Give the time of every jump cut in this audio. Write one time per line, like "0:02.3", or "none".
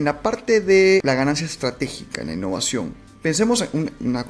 0:01.0
0:03.0